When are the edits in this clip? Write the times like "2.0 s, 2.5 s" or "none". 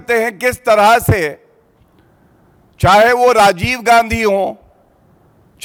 none